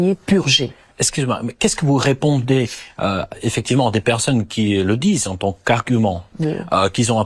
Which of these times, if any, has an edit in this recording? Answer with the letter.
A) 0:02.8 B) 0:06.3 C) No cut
B